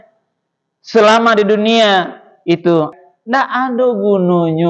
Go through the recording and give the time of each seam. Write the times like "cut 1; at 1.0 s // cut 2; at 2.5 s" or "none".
cut 1; at 2.9 s